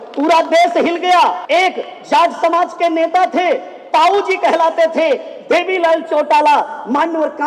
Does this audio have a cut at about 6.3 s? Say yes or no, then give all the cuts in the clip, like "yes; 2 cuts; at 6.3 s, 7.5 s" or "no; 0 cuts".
no; 1 cut; at 1.4 s